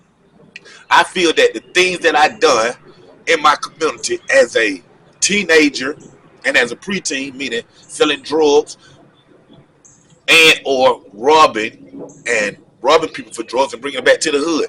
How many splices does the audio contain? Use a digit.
0